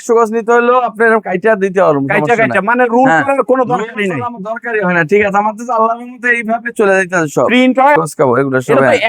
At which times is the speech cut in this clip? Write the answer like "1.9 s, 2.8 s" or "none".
8.0 s